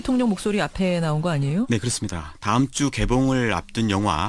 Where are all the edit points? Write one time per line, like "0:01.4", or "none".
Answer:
none